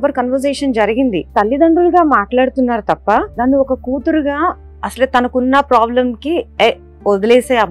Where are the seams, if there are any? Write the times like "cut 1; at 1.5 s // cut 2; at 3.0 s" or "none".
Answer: cut 1; at 1.3 s // cut 2; at 3.3 s